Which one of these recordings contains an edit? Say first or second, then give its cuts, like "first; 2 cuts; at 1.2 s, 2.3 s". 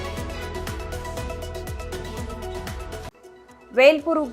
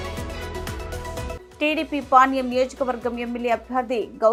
first; 2 cuts; at 1.4 s, 2.5 s